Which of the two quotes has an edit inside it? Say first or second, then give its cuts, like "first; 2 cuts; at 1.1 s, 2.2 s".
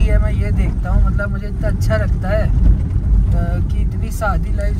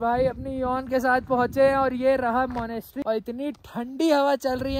second; 1 cut; at 3.0 s